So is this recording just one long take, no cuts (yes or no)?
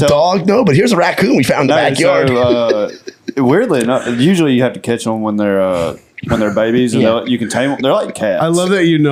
yes